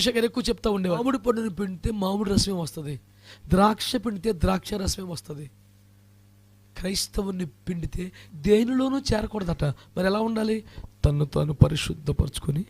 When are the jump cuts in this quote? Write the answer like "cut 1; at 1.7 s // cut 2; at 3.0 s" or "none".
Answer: cut 1; at 1.0 s // cut 2; at 8.2 s